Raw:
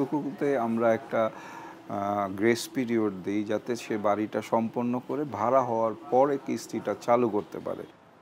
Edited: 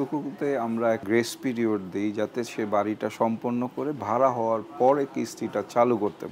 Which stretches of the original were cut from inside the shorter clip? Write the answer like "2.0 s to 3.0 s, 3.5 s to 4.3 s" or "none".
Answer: 1.0 s to 2.4 s